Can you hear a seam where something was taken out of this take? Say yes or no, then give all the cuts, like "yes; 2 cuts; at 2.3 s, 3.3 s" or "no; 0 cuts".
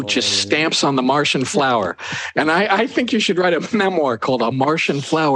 no; 0 cuts